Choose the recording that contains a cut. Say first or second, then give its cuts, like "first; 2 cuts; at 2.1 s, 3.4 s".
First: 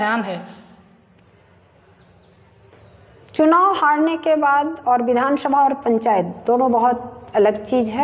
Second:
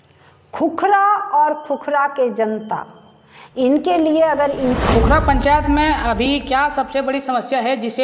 second; 1 cut; at 4.8 s